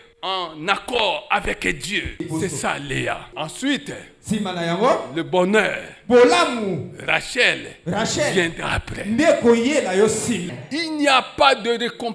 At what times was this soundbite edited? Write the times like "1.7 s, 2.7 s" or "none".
2.2 s, 3.3 s, 10.5 s